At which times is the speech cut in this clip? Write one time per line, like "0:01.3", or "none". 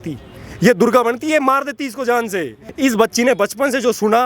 0:02.6